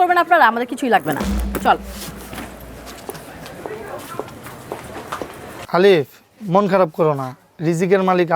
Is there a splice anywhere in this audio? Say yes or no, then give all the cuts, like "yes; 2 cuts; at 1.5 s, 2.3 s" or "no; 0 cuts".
yes; 1 cut; at 5.6 s